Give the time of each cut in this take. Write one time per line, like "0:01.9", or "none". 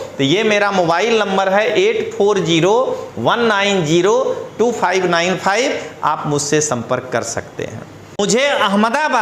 0:08.2